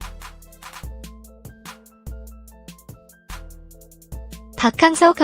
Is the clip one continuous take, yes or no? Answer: no